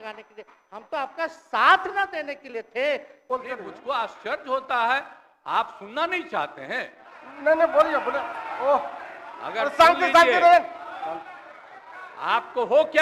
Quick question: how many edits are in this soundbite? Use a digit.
1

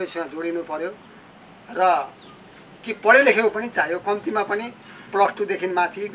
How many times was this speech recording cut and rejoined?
0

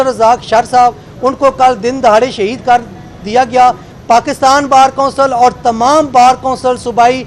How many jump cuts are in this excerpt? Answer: 1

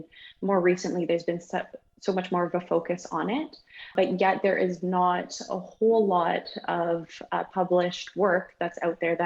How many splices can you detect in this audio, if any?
1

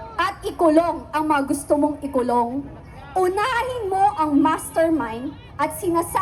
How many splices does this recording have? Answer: 0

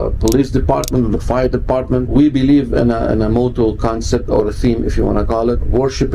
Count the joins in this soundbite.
1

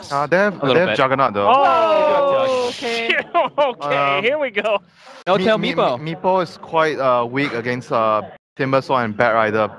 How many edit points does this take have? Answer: 0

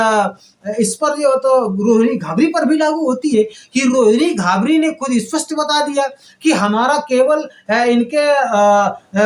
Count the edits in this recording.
0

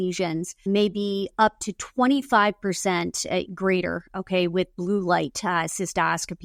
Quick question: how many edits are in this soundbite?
0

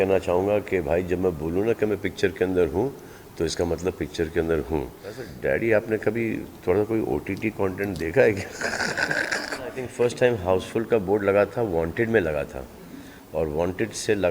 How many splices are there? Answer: 2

